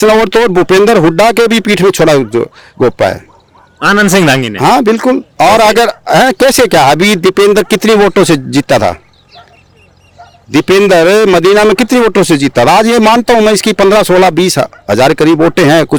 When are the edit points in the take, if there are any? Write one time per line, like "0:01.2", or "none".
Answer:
none

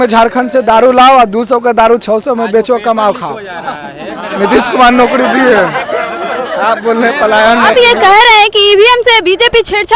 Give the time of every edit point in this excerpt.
0:07.7

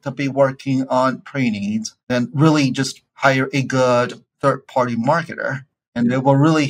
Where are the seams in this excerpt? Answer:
0:01.9
0:03.0
0:04.2
0:05.9

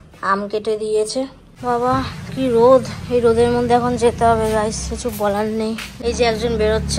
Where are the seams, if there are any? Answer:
0:01.6
0:05.9

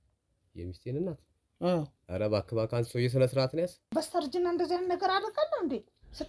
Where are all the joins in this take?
0:03.9

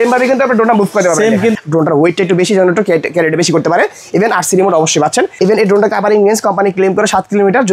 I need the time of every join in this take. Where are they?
0:01.5
0:05.4

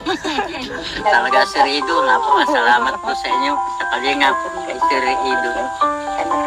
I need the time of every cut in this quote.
0:00.9

